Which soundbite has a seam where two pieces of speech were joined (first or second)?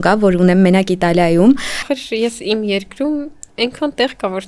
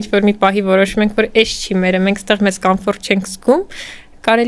first